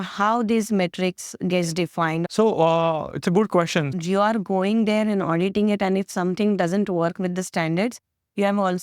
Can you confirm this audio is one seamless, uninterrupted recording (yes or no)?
no